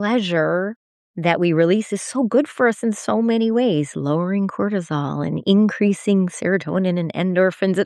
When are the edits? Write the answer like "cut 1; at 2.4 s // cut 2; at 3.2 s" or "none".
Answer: none